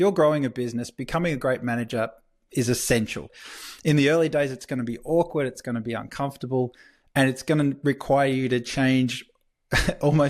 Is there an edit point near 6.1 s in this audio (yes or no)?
no